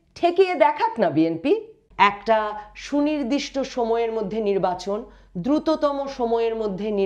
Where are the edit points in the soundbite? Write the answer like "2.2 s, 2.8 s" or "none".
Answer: 1.8 s